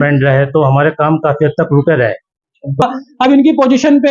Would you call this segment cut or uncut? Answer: cut